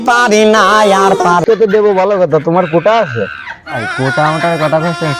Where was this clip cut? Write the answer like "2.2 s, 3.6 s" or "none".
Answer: 1.4 s